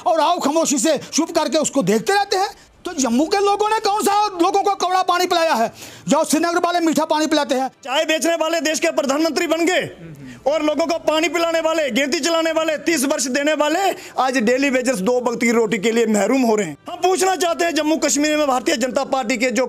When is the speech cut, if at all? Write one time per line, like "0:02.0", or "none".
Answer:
0:02.7
0:07.8
0:16.8